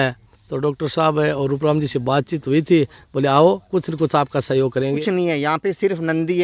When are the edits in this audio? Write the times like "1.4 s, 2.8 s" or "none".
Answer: 5.0 s